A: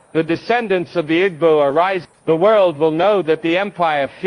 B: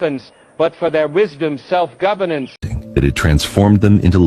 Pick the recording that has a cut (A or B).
B